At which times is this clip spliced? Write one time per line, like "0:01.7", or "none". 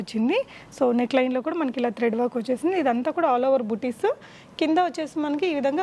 none